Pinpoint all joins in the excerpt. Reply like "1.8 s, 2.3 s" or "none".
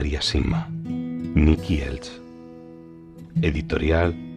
none